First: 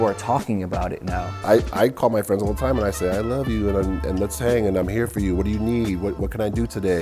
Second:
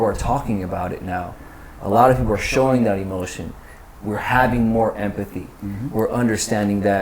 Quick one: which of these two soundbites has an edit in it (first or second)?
first